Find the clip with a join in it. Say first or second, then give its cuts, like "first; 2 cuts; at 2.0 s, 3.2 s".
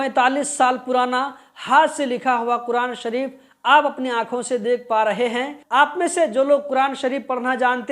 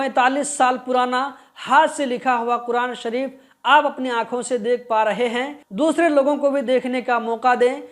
first; 1 cut; at 5.6 s